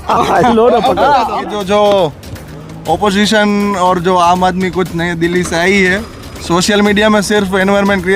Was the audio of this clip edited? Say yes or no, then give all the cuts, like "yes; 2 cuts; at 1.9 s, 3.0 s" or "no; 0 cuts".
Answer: yes; 2 cuts; at 1.4 s, 6.4 s